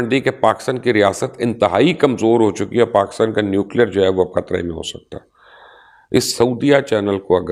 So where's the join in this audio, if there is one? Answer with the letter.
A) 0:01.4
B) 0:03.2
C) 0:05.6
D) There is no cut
D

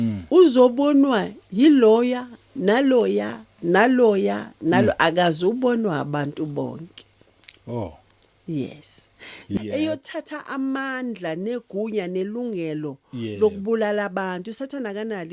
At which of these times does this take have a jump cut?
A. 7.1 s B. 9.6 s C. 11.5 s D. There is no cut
B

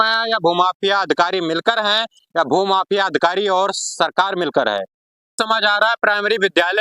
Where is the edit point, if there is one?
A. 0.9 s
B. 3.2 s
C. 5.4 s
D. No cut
C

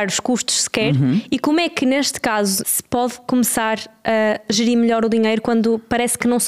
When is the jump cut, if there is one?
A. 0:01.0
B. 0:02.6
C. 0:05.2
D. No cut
B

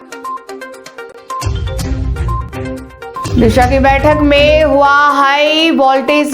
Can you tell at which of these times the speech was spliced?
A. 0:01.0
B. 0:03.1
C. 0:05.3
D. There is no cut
A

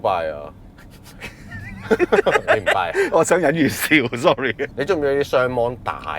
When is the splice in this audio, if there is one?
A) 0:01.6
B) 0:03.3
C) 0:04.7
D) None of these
C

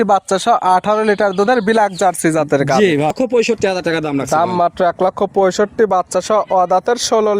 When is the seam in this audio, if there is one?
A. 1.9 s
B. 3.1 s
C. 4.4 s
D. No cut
B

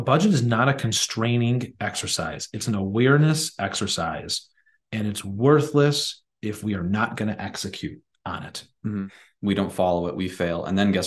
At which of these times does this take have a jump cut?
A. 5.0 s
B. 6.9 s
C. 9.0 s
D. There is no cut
C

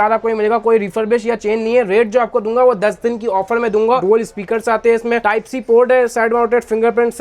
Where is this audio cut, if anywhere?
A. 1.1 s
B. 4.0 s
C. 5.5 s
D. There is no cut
B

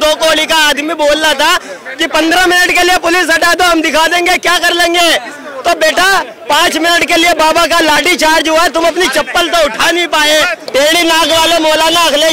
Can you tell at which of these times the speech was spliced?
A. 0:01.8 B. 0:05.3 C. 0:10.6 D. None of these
C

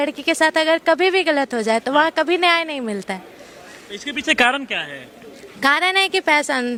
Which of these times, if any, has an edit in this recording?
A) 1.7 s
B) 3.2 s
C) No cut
C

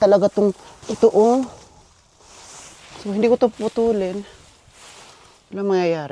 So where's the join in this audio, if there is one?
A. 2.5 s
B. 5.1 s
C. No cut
C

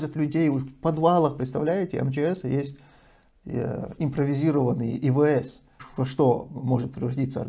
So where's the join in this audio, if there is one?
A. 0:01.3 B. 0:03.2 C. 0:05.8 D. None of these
C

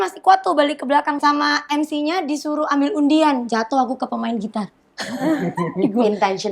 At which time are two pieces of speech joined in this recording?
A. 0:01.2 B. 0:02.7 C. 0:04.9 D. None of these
A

